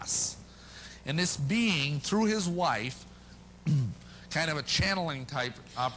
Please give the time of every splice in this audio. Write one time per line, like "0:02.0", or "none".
0:04.3